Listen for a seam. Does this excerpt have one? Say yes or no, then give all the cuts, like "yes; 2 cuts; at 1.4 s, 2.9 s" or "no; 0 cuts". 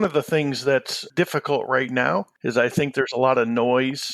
yes; 2 cuts; at 1.0 s, 2.3 s